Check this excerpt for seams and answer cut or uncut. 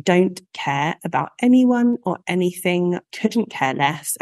cut